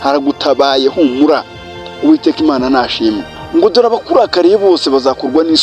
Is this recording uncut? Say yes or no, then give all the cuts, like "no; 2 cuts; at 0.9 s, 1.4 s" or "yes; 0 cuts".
no; 1 cut; at 3.3 s